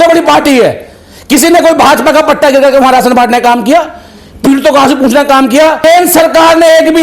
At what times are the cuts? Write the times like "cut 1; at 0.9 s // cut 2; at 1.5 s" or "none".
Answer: cut 1; at 5.8 s